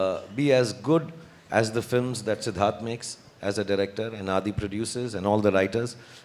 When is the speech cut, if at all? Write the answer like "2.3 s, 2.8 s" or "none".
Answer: none